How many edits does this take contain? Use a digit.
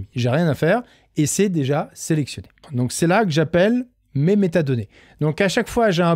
1